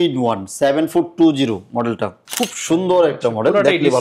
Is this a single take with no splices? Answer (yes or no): yes